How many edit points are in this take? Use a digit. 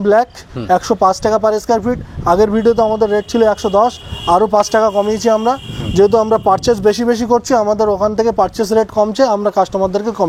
0